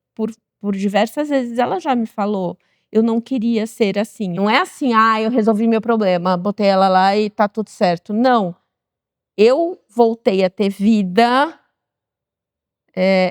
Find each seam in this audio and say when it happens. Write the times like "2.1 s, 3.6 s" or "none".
4.4 s